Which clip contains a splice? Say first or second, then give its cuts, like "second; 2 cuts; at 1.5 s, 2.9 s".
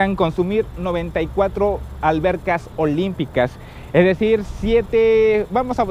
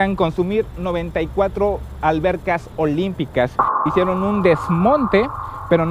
second; 1 cut; at 3.9 s